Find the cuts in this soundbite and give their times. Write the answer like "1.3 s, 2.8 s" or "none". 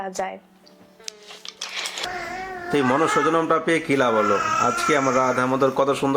2.0 s